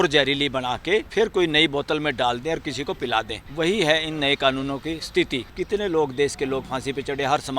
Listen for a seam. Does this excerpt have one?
yes; 3 cuts; at 1.1 s, 3.4 s, 5.5 s

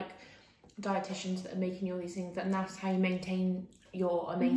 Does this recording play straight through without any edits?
yes; 0 cuts

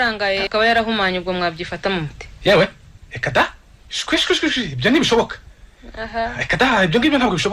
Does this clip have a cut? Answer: no; 0 cuts

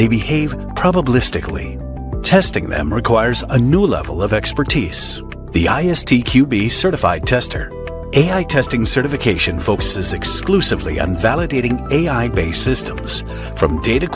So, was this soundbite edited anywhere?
yes; 1 cut; at 8.0 s

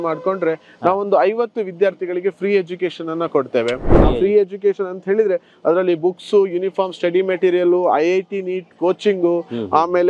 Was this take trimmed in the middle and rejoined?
yes; 1 cut; at 4.0 s

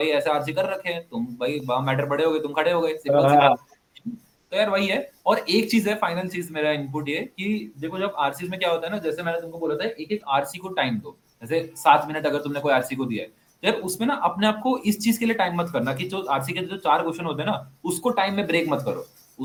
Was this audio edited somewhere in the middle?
no; 0 cuts

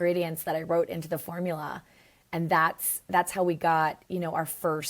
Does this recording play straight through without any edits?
yes; 0 cuts

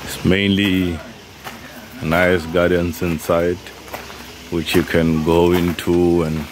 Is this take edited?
no; 0 cuts

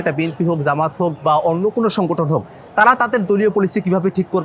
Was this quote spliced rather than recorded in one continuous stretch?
no; 0 cuts

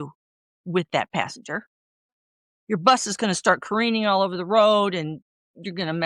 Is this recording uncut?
yes; 0 cuts

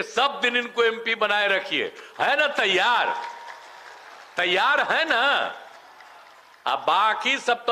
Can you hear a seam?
no; 0 cuts

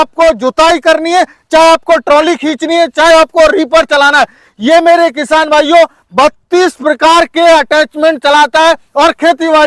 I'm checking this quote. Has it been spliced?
no; 0 cuts

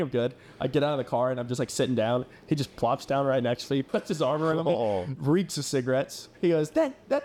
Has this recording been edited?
yes; 3 cuts; at 3.9 s, 5.1 s, 6.2 s

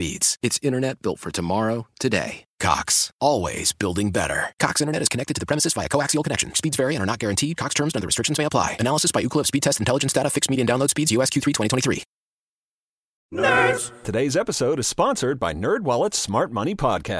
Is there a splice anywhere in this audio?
yes; 1 cut; at 13.1 s

